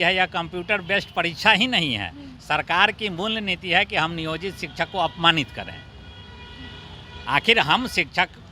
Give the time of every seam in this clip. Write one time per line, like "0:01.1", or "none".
none